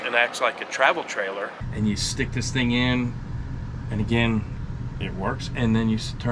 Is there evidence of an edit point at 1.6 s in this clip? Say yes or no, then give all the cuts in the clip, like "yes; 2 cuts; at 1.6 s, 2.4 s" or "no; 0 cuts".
yes; 1 cut; at 1.6 s